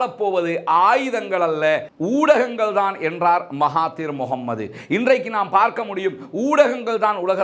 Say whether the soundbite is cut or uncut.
uncut